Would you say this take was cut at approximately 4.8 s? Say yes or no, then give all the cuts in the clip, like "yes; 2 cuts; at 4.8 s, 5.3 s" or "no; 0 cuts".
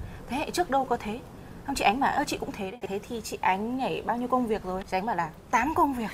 yes; 2 cuts; at 2.8 s, 4.8 s